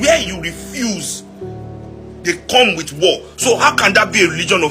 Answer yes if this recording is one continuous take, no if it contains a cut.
yes